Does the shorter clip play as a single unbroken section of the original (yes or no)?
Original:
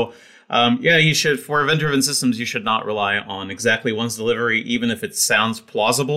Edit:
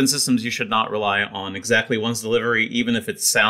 yes